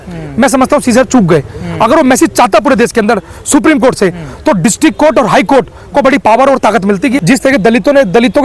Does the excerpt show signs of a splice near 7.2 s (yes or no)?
yes